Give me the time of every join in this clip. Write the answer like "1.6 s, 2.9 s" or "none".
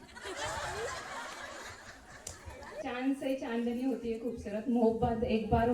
2.8 s